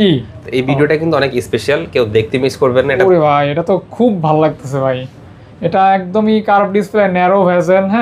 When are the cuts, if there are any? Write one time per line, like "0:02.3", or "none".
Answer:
0:03.0